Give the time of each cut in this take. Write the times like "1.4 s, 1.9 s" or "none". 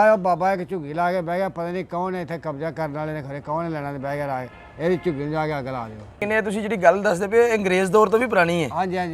6.2 s